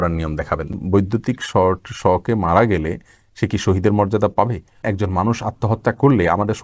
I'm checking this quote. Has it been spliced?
yes; 2 cuts; at 0.7 s, 4.8 s

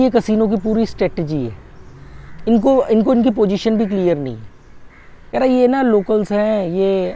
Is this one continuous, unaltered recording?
no; 1 cut; at 5.2 s

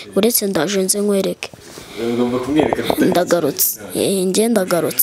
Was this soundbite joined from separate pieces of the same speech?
no; 0 cuts

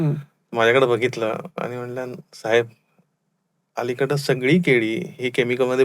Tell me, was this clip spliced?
no; 0 cuts

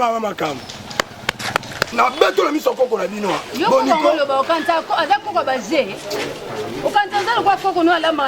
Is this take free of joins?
no; 2 cuts; at 1.8 s, 3.5 s

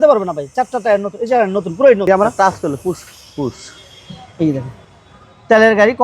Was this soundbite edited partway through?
yes; 1 cut; at 2.1 s

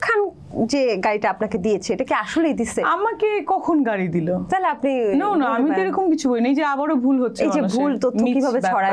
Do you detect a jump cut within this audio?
no; 0 cuts

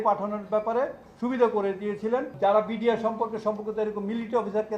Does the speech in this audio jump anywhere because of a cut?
yes; 1 cut; at 2.3 s

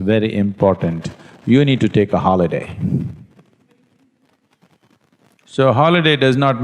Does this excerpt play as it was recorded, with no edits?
yes; 0 cuts

